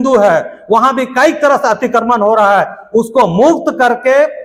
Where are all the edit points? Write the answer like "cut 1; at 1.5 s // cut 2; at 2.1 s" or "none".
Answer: none

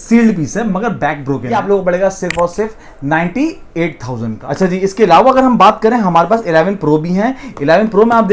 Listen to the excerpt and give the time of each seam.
cut 1; at 1.6 s // cut 2; at 4.4 s

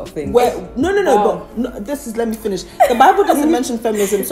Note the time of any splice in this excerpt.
none

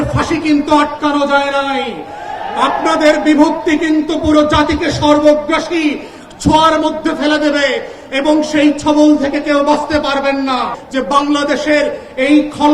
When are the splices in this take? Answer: cut 1; at 10.8 s

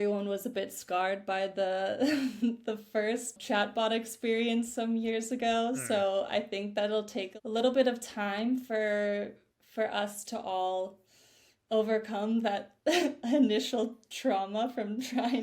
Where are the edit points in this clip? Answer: cut 1; at 3.4 s // cut 2; at 7.2 s

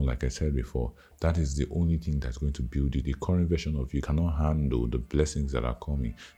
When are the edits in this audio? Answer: cut 1; at 1.0 s

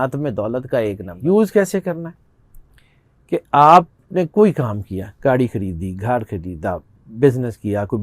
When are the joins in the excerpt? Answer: cut 1; at 1.1 s

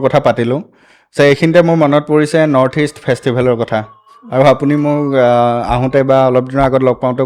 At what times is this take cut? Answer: none

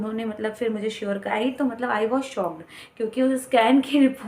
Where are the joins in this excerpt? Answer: cut 1; at 1.3 s

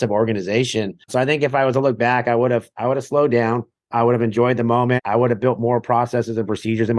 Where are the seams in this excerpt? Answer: cut 1; at 1.0 s // cut 2; at 3.8 s // cut 3; at 5.0 s

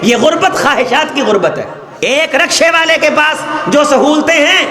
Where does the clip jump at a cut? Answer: cut 1; at 1.8 s

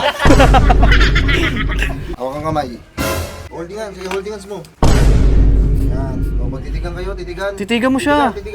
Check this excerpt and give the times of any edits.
cut 1; at 2.1 s // cut 2; at 3.4 s

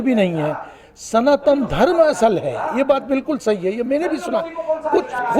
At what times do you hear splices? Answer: none

